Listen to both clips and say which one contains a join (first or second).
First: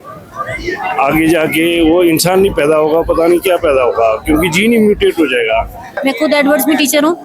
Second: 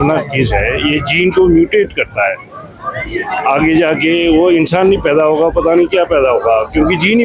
first